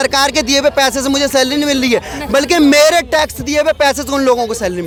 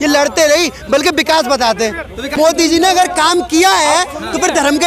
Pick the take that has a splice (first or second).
second